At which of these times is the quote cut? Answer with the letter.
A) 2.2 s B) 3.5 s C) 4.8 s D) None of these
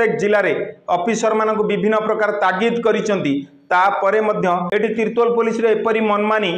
D